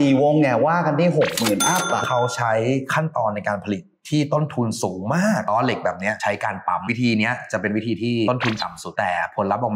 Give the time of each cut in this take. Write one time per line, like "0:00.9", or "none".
0:02.0
0:05.5
0:06.8
0:08.3